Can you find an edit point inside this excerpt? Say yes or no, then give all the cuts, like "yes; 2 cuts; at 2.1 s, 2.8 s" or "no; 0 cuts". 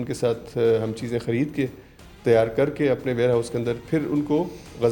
no; 0 cuts